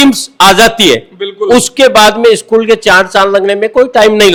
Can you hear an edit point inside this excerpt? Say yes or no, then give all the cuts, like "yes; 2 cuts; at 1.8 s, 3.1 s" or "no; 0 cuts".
no; 0 cuts